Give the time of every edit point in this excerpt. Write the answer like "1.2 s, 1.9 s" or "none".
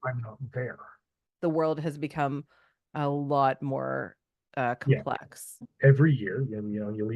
1.2 s, 5.7 s

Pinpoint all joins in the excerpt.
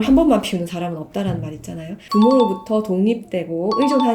2.0 s

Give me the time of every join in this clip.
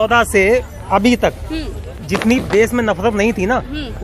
none

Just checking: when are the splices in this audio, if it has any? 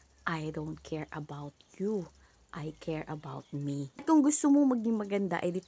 4.0 s

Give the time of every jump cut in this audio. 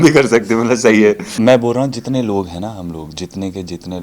1.3 s

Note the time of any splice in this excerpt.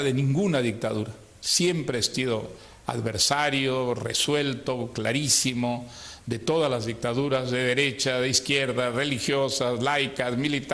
none

